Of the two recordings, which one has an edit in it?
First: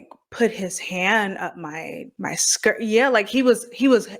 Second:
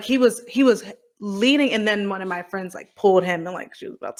first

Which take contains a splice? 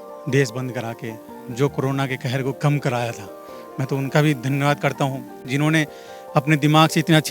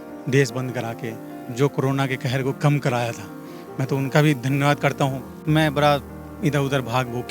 second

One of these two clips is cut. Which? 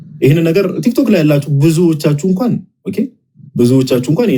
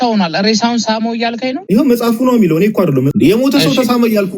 second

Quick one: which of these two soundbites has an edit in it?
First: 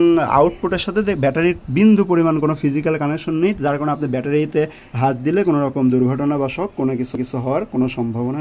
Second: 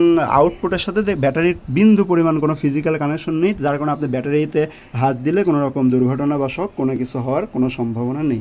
second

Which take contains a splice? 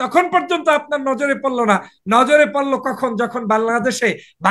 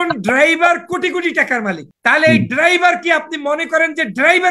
second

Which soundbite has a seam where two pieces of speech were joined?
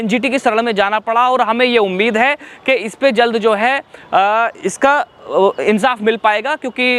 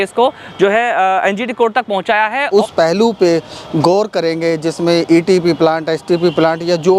second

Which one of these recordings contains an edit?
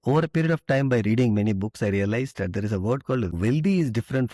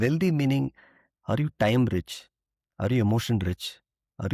first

